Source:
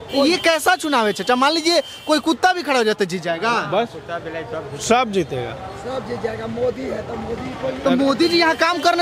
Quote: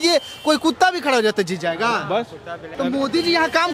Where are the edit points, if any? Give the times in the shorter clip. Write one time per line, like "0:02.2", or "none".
0:02.7